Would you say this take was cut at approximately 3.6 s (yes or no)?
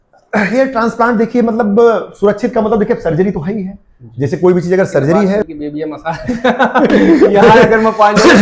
no